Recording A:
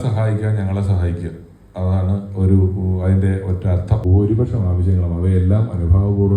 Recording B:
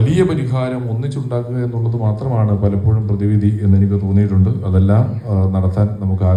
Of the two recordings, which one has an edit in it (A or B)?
A